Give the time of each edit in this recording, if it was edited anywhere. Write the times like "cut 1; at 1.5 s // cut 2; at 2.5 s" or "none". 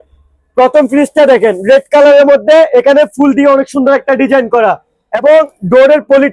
none